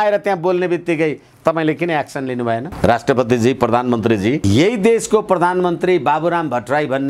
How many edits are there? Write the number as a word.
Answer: one